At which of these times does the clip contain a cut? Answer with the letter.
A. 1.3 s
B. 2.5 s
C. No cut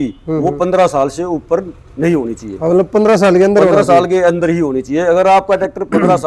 C